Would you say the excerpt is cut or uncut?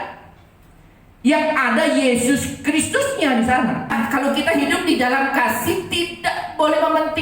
cut